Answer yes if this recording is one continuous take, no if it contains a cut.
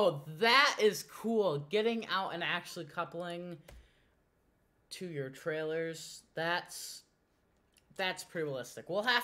yes